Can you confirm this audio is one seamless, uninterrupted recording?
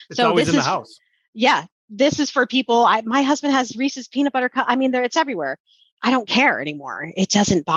yes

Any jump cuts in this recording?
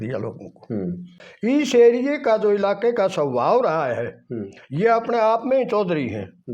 yes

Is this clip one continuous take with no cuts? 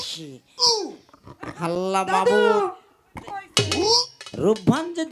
yes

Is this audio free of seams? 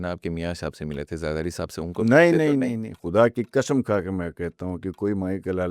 yes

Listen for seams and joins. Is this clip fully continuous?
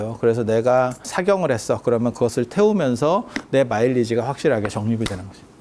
yes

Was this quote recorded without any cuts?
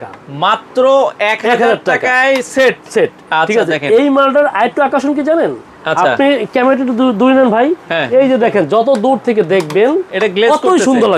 yes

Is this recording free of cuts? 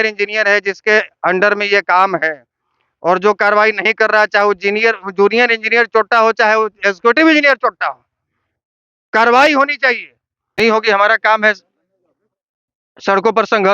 no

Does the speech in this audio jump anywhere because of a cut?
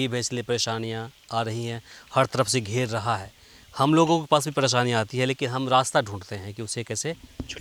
no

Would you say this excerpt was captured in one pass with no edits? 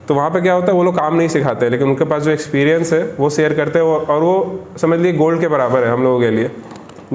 yes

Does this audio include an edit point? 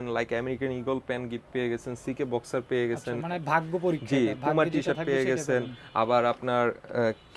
no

